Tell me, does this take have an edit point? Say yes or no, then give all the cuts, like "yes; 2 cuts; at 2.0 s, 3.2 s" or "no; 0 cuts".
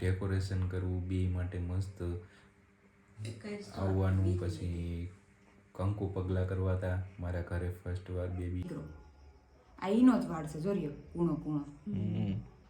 yes; 1 cut; at 8.6 s